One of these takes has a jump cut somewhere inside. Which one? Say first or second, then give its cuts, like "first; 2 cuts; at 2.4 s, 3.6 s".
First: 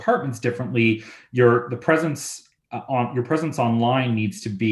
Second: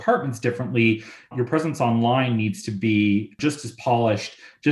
second; 2 cuts; at 1.3 s, 3.3 s